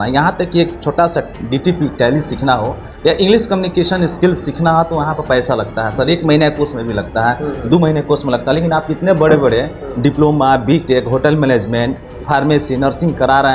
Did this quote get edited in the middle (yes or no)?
no